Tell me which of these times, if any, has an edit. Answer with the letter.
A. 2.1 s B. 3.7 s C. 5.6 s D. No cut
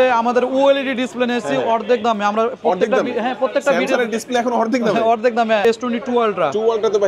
C